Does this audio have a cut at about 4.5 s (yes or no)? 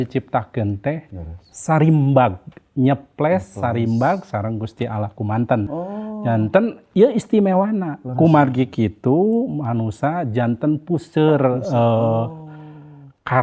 no